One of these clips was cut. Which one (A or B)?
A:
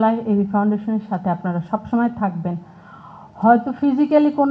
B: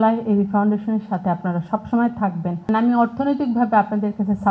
B